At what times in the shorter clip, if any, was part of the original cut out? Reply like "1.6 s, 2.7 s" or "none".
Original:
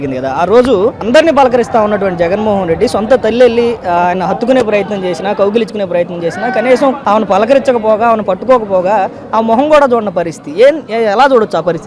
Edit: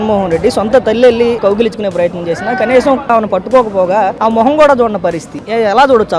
1.4 s, 3.1 s, 4.1 s, 5.4 s